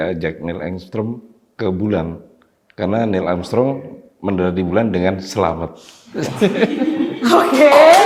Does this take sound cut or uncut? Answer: uncut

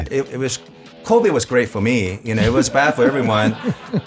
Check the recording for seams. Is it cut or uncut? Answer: uncut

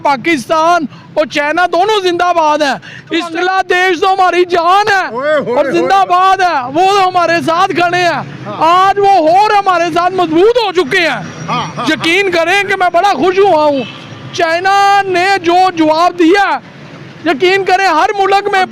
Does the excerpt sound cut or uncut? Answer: cut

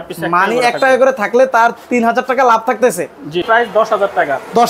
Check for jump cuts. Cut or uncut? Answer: cut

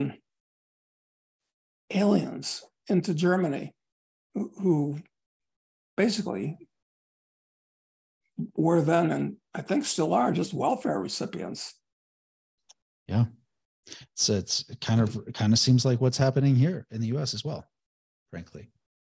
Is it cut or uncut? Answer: uncut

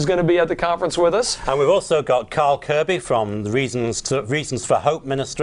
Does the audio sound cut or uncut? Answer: cut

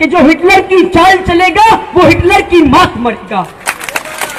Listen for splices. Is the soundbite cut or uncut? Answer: uncut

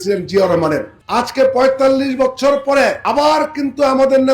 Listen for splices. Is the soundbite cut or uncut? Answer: cut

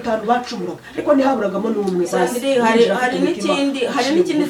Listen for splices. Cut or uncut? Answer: uncut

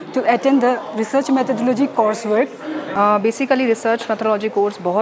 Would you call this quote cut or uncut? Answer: cut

